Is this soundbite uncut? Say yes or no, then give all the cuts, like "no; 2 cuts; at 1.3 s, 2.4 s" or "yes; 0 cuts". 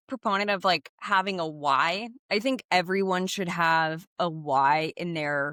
yes; 0 cuts